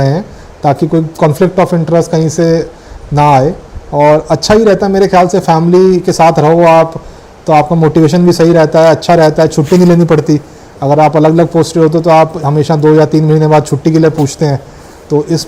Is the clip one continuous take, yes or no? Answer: yes